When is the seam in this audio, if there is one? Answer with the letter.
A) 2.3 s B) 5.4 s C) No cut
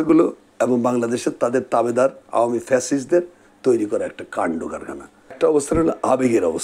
B